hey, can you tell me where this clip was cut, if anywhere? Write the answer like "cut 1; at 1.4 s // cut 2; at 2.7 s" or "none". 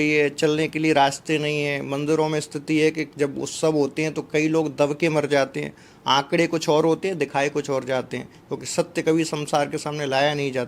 none